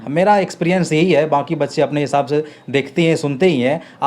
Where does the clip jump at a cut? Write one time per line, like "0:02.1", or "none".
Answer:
none